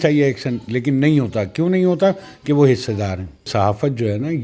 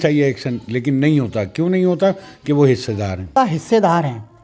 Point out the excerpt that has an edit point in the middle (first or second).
first